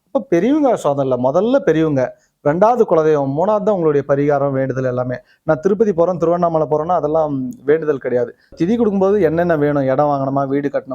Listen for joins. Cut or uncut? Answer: cut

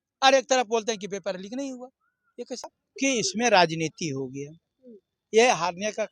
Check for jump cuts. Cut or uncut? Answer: cut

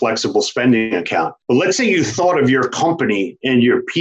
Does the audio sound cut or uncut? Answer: cut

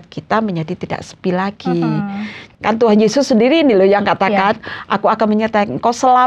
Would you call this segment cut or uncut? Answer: cut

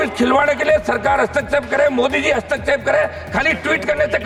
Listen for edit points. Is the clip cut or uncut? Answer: uncut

